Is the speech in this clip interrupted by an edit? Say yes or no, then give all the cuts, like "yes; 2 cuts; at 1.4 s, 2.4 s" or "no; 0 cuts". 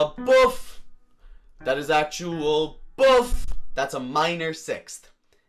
yes; 1 cut; at 3.6 s